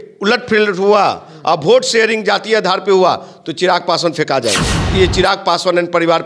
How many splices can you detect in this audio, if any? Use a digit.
1